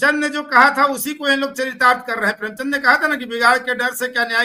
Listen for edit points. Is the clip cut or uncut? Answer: uncut